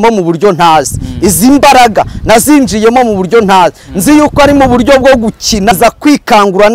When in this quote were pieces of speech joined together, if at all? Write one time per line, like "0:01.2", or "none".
0:05.7